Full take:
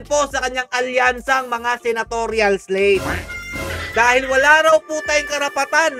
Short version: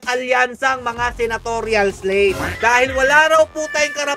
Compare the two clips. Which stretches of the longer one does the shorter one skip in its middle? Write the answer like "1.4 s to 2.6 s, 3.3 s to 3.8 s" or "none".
3.1 s to 3.8 s